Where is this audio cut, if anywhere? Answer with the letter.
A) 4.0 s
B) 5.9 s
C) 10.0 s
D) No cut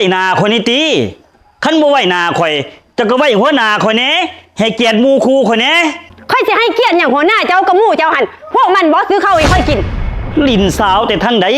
C